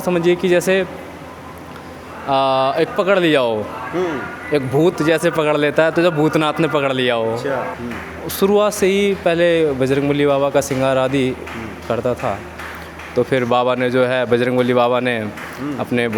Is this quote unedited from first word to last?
no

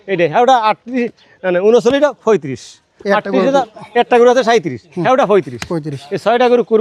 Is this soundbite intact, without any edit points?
yes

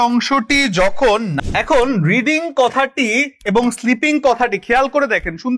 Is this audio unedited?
no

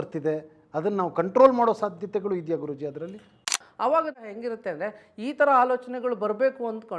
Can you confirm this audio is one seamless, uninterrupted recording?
no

